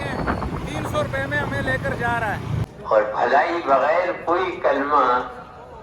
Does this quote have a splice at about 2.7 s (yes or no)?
yes